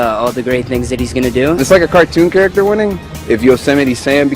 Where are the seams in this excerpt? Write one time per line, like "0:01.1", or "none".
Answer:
0:01.6
0:03.1